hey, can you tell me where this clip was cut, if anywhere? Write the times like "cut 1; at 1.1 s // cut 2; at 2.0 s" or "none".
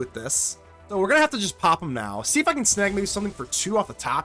cut 1; at 0.9 s